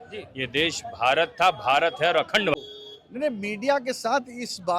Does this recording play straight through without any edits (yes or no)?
no